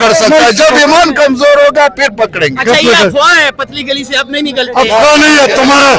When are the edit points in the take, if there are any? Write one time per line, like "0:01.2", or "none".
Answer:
none